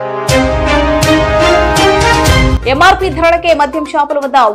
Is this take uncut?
yes; 0 cuts

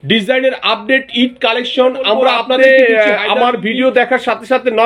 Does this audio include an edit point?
yes; 1 cut; at 2.6 s

